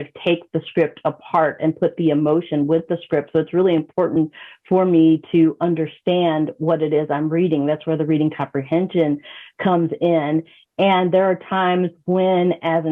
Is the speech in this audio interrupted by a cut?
no; 0 cuts

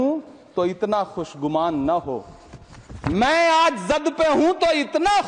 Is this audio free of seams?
yes; 0 cuts

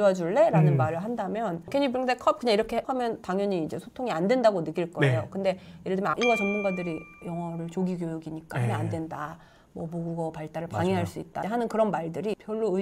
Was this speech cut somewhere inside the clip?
yes; 1 cut; at 6.1 s

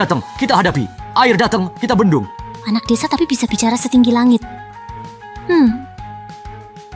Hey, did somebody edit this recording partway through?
yes; 1 cut; at 5.8 s

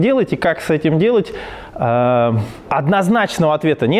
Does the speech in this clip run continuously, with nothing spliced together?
yes; 0 cuts

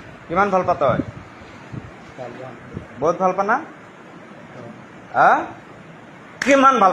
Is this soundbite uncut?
yes; 0 cuts

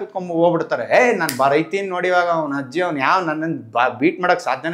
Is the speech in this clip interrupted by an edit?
no; 0 cuts

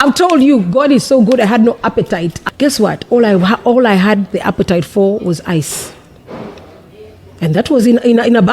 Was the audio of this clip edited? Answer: yes; 1 cut; at 2.3 s

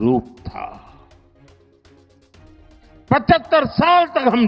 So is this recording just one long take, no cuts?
yes; 0 cuts

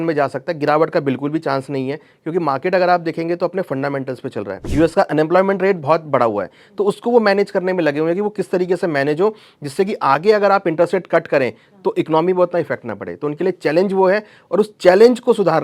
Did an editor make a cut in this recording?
yes; 1 cut; at 4.6 s

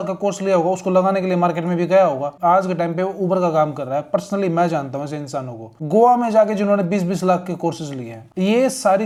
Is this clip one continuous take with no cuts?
yes; 0 cuts

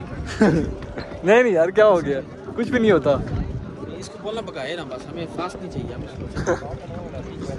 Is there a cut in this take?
no; 0 cuts

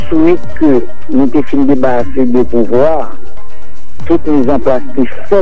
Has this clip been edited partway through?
no; 0 cuts

